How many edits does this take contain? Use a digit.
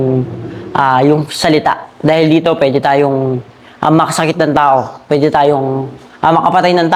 0